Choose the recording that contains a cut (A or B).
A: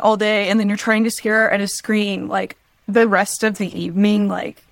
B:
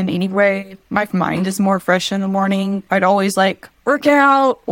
B